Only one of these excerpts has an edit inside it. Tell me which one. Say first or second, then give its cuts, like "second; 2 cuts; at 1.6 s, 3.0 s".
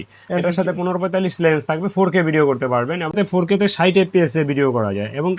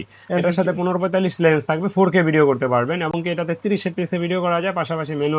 first; 1 cut; at 3.1 s